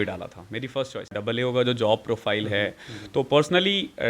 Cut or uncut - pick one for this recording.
cut